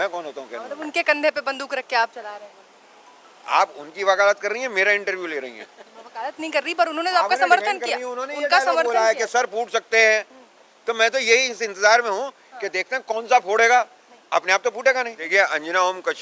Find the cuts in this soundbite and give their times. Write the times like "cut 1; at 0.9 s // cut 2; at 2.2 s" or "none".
cut 1; at 15.3 s